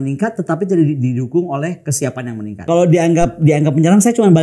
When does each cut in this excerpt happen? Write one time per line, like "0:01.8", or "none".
0:02.6